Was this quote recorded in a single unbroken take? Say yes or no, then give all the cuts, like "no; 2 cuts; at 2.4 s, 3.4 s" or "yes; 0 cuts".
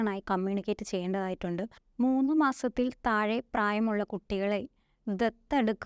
no; 1 cut; at 1.8 s